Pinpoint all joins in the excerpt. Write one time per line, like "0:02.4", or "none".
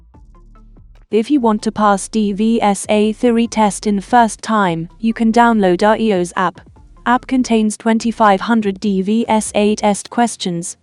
0:01.0